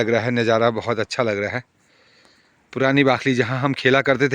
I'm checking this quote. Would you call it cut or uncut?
uncut